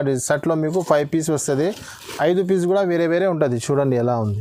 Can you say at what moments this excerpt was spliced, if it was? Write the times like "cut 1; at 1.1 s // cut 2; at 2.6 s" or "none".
none